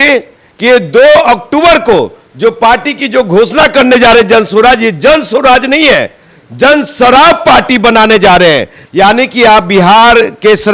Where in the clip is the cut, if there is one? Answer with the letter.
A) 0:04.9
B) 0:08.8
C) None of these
B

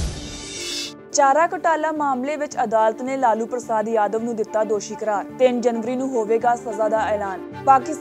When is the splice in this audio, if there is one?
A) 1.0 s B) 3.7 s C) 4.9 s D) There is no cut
A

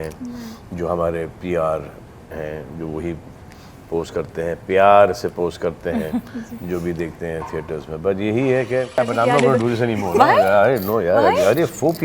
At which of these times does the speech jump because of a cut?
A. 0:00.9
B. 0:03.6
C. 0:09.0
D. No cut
C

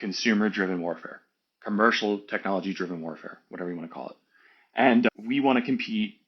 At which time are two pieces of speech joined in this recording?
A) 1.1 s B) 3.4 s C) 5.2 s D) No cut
D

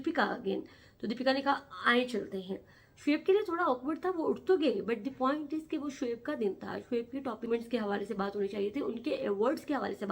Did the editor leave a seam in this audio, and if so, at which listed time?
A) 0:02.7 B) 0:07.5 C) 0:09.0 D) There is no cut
B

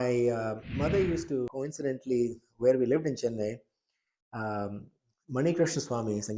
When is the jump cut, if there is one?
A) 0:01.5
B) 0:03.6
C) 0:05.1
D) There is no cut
A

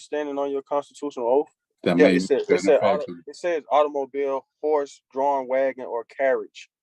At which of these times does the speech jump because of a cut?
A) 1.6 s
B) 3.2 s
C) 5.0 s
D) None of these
A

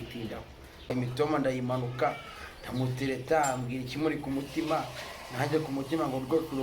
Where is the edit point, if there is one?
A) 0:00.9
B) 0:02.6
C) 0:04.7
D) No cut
A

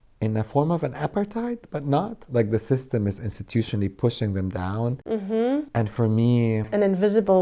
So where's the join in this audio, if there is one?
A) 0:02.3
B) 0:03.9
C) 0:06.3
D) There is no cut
D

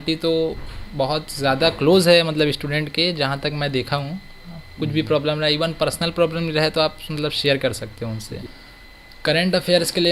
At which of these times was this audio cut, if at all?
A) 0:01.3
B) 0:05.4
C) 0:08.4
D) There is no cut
C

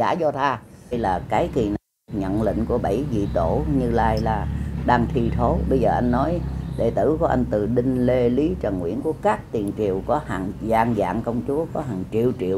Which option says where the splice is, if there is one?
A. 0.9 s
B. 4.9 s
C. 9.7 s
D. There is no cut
A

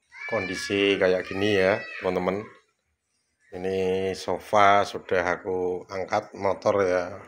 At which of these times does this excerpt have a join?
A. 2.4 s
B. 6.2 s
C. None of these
C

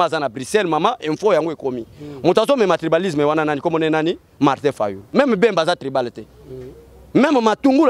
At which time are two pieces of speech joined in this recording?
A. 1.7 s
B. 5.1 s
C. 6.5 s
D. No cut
B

